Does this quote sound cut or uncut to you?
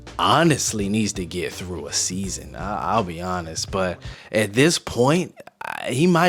uncut